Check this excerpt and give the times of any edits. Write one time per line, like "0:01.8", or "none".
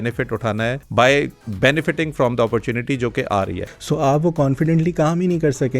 0:00.8
0:01.4
0:03.7